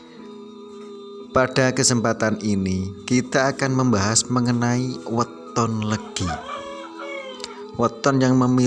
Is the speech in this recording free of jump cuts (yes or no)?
no